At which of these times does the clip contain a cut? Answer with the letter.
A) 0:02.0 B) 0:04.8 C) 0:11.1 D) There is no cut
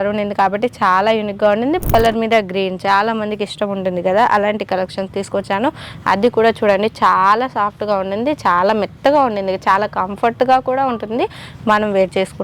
A